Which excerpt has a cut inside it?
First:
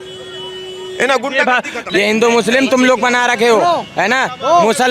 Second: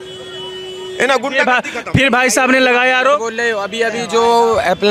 first; 1 cut; at 1.8 s

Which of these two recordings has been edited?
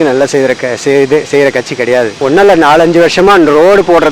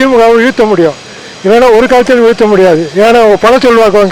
first; 1 cut; at 2.1 s

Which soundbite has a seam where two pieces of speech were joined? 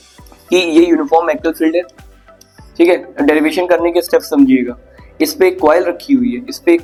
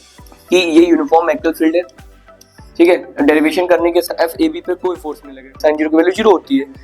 second; 1 cut; at 4.1 s

